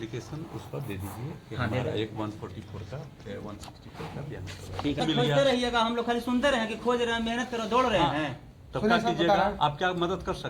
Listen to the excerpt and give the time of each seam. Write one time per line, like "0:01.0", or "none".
0:05.0

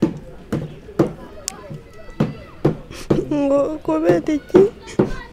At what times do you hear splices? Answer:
none

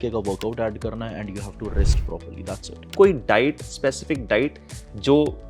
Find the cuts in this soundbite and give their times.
0:02.8

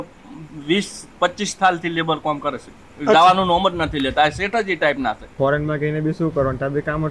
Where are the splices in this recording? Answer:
0:05.3

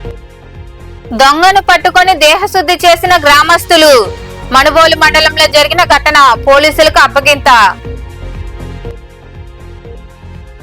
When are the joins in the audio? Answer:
0:01.1

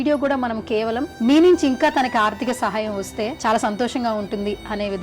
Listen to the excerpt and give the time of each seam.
0:01.1
0:03.4

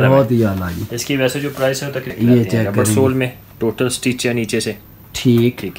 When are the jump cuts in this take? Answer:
0:02.1

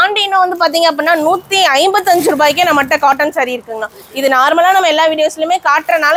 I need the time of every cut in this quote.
none

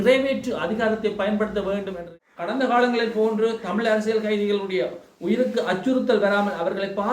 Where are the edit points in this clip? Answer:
0:02.1

